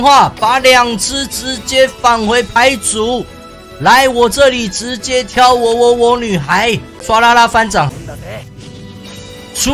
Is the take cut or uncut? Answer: cut